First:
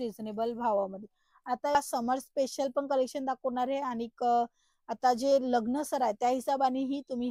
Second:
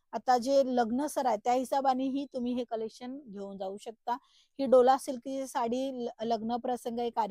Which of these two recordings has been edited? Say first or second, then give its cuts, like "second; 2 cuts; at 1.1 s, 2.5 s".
first; 1 cut; at 1.8 s